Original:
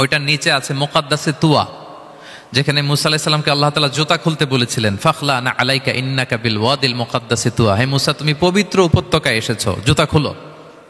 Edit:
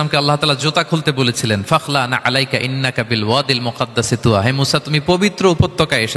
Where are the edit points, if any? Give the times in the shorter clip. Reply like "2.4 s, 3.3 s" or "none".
none